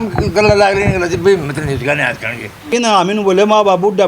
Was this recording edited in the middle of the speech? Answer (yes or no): yes